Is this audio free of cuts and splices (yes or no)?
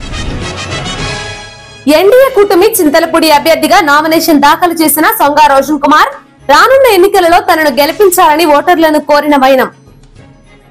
no